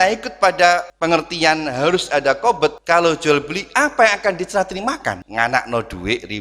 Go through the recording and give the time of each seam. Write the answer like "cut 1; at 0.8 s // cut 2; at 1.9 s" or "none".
cut 1; at 0.9 s // cut 2; at 2.8 s // cut 3; at 5.2 s